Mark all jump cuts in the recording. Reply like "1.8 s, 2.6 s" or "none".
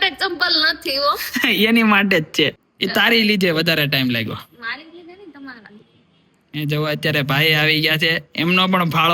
2.6 s